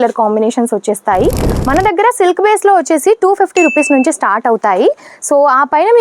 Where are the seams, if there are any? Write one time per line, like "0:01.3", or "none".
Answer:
0:01.5